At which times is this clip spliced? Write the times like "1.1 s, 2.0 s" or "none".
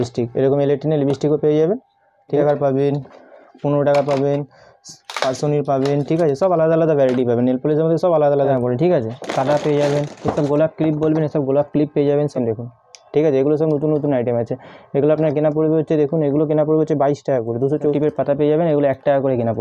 2.4 s, 8.5 s, 12.4 s, 17.9 s